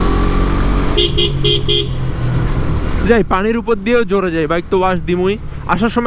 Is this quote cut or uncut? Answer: uncut